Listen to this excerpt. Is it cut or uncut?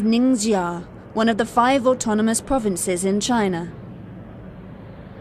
uncut